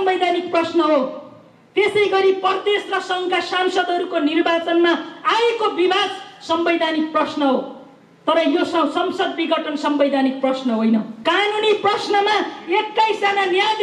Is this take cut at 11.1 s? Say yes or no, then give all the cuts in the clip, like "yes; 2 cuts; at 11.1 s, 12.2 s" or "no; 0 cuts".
yes; 1 cut; at 11.1 s